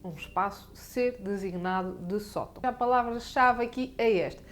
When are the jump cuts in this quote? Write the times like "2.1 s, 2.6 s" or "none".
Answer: 2.6 s